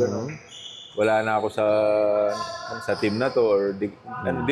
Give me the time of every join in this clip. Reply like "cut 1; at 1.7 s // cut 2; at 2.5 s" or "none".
none